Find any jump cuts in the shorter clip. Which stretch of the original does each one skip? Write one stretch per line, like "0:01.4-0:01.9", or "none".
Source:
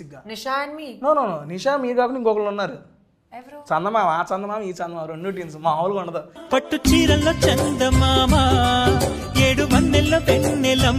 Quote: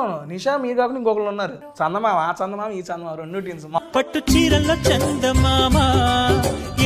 0:02.8-0:03.5
0:05.7-0:06.4